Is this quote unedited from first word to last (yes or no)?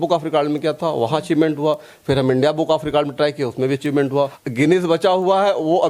no